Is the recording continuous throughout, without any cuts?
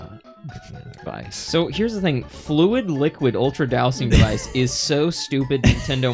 no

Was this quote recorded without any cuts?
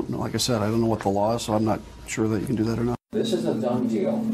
no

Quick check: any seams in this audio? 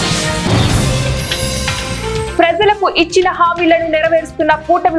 yes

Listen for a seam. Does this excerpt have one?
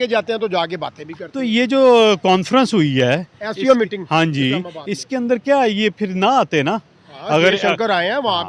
no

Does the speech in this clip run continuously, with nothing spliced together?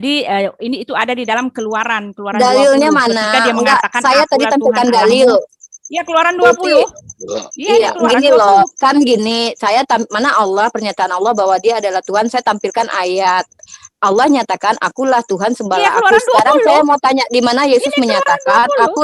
yes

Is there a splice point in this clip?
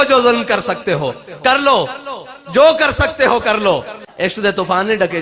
yes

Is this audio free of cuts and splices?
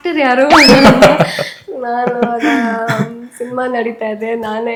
yes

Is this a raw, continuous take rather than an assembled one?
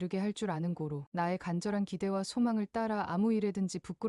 no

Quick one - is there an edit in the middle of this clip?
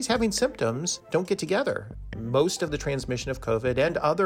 yes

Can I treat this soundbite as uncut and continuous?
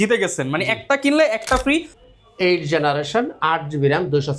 no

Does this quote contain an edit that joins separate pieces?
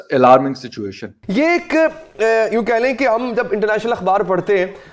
yes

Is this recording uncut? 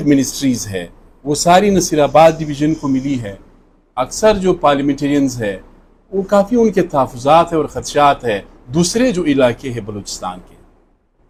yes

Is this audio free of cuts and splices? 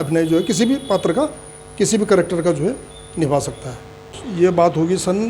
no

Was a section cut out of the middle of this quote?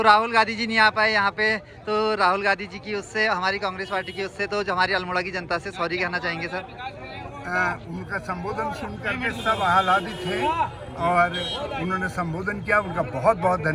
no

